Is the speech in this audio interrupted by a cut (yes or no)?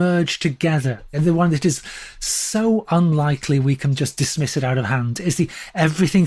yes